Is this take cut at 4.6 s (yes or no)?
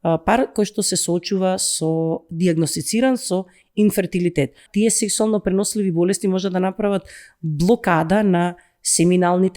yes